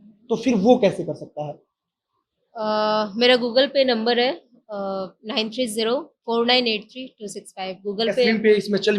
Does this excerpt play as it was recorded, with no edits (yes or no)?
yes